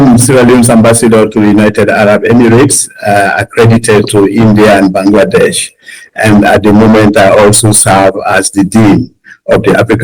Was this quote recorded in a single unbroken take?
yes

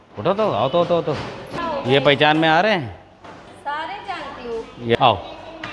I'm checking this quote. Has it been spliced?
yes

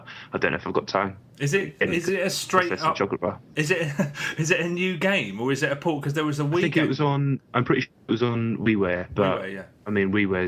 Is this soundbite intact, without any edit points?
no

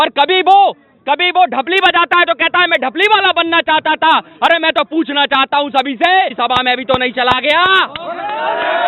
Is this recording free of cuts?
no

